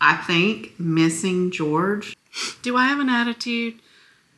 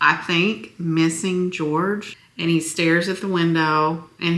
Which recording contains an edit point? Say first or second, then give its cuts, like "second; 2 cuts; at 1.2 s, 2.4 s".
first; 1 cut; at 2.2 s